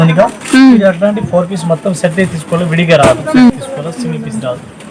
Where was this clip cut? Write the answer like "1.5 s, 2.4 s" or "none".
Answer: 3.5 s